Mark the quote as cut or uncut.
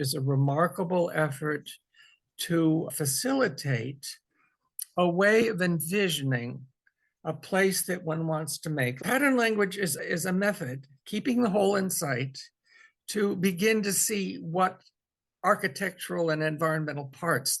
cut